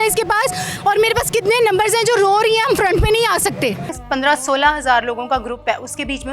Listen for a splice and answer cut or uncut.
cut